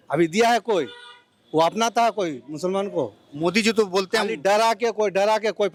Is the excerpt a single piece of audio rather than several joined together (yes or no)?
yes